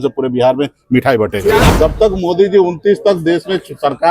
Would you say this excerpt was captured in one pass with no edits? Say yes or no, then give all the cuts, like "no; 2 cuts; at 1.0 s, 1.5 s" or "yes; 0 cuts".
no; 1 cut; at 1.7 s